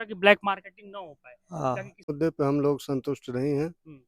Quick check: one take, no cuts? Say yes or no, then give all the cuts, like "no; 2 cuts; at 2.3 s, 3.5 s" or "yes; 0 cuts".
no; 1 cut; at 2.1 s